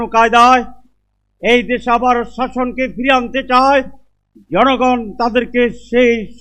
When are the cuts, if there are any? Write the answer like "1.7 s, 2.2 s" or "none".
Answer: none

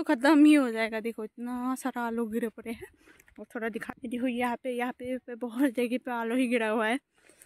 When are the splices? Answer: 3.9 s

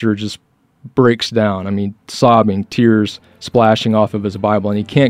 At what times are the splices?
none

